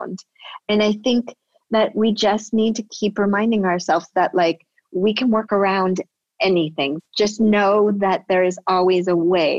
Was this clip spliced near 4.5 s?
no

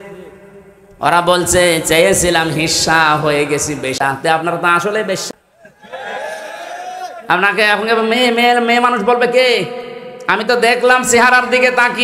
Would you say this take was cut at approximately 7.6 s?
no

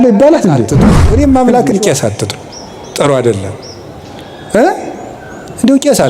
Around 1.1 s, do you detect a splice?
yes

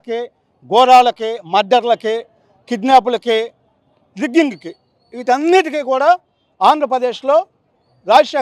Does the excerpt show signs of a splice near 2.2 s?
no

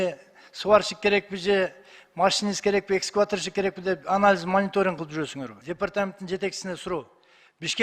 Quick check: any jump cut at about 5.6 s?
yes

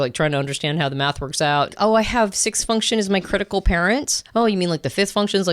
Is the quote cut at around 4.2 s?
yes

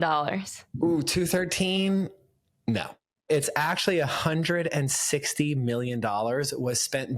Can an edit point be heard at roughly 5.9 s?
no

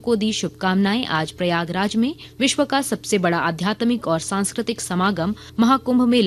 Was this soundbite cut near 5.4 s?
yes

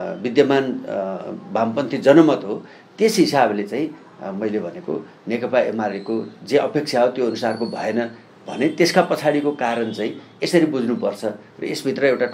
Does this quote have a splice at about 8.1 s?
no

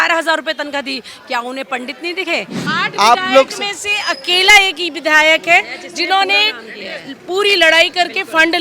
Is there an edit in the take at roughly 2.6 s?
yes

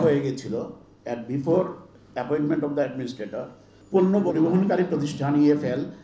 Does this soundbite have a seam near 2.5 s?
no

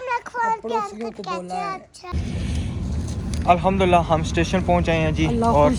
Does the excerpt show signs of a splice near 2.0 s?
yes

